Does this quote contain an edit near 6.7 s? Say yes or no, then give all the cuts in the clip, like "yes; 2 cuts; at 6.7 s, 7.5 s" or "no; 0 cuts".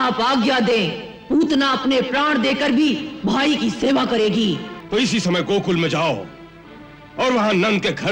no; 1 cut; at 4.7 s